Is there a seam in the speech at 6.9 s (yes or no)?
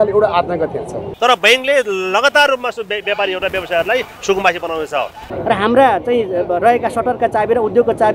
no